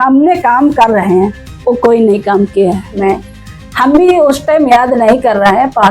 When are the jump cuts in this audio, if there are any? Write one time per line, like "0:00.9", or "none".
0:03.0